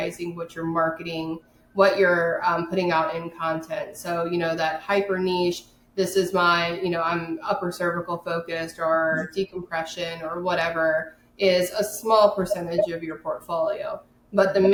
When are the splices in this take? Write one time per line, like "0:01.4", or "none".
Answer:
none